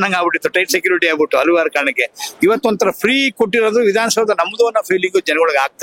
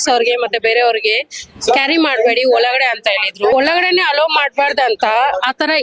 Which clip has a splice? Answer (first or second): second